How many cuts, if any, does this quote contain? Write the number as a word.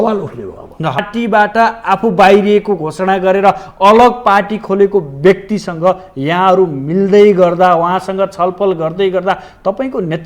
one